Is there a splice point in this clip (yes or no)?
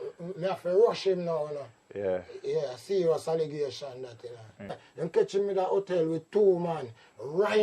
yes